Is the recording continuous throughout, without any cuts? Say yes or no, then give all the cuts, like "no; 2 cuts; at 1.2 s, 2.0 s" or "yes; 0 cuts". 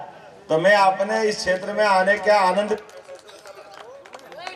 yes; 0 cuts